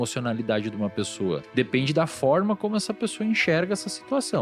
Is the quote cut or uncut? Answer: cut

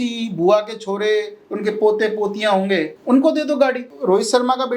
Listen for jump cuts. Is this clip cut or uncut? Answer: cut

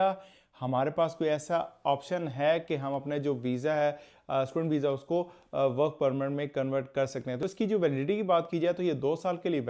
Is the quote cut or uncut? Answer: cut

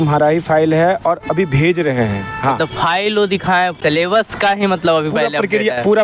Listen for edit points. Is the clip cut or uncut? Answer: cut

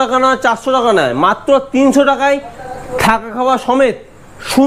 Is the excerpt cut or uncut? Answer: uncut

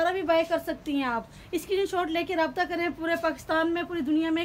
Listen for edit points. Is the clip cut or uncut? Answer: uncut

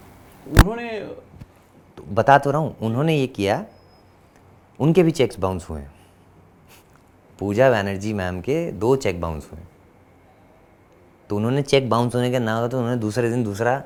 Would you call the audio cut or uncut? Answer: uncut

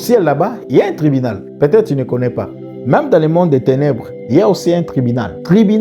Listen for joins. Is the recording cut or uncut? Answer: uncut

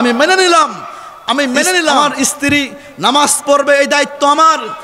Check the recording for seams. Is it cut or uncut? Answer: cut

